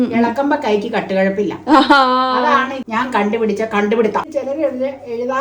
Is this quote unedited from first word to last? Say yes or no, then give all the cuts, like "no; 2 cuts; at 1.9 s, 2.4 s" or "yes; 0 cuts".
no; 2 cuts; at 2.8 s, 4.2 s